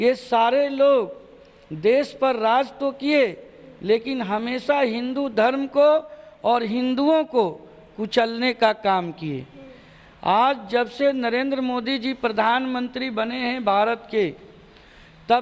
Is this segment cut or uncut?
uncut